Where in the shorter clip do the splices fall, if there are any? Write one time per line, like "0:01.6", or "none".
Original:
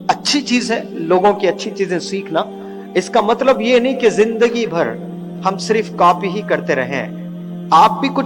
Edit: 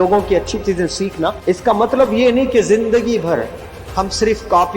0:01.4